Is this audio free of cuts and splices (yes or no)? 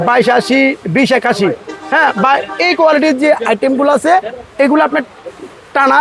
yes